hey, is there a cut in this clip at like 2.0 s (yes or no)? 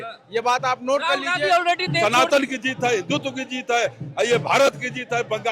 yes